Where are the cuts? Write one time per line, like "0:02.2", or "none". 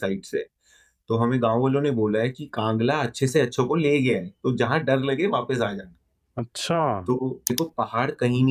0:07.5